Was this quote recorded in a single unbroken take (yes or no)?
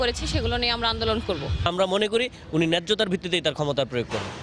yes